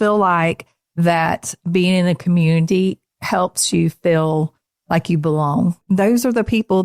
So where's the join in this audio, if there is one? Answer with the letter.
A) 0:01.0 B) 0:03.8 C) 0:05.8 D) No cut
C